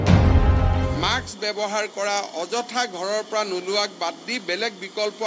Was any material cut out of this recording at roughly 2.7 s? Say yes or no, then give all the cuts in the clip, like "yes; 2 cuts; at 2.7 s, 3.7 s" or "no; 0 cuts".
no; 1 cut; at 0.9 s